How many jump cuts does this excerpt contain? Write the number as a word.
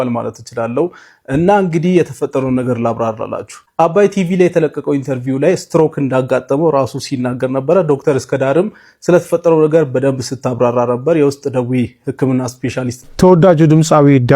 one